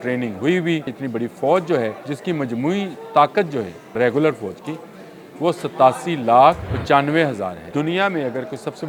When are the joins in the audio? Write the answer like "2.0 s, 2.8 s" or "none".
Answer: 1.0 s, 2.1 s, 3.9 s, 6.7 s, 7.6 s